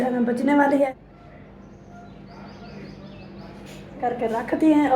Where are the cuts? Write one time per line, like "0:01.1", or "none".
0:00.9
0:04.0